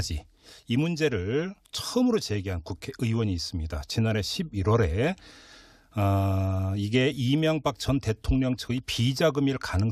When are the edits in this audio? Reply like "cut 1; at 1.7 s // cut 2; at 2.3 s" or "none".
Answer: cut 1; at 3.5 s